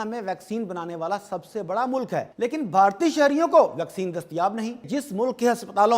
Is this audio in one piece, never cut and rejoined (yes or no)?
no